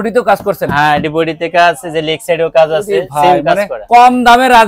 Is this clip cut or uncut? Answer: uncut